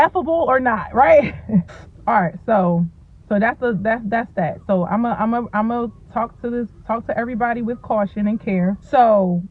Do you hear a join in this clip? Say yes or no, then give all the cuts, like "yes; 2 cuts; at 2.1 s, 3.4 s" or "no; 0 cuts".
no; 0 cuts